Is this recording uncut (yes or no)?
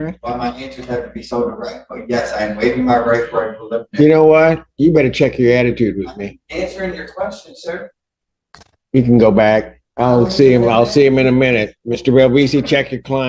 yes